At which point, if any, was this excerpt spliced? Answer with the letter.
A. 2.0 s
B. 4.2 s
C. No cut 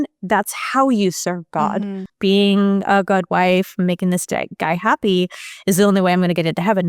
A